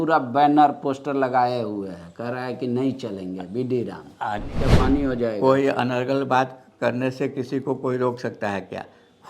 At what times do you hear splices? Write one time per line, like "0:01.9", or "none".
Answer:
0:04.7